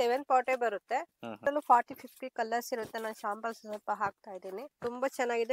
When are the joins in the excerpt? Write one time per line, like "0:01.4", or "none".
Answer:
0:01.4
0:04.7